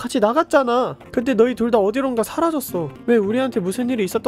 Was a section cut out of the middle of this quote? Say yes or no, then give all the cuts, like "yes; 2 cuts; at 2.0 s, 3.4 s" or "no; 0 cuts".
yes; 2 cuts; at 1.0 s, 2.9 s